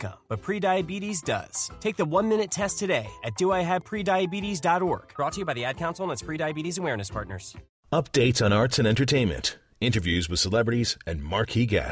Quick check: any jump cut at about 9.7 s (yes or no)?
no